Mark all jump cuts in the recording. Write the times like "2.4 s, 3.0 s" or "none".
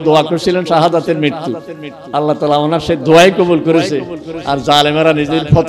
none